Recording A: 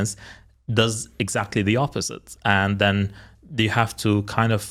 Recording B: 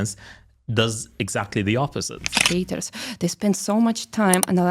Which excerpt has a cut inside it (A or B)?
B